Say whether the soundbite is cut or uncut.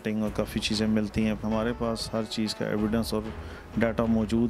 cut